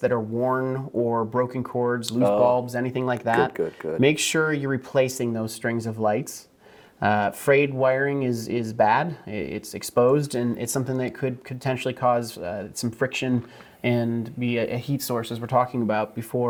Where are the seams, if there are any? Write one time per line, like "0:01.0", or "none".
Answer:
none